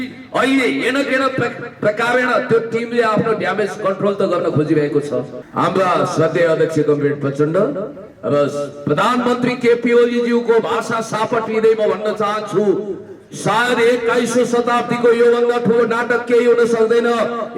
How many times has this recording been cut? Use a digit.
1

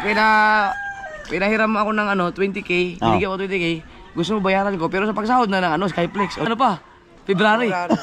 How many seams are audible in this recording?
1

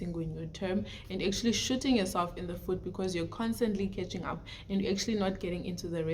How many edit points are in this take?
0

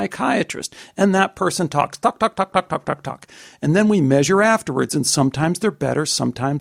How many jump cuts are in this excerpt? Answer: 0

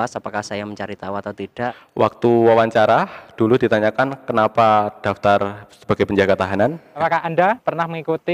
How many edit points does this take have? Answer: 2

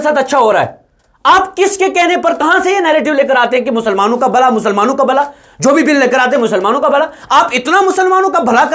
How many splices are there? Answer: 0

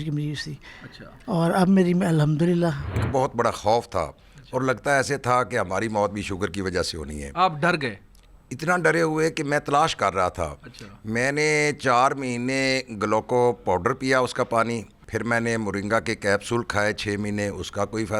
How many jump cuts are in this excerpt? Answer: 2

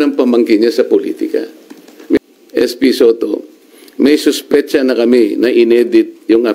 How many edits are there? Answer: 1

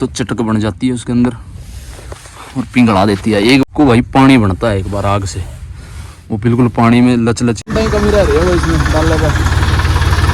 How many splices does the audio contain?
2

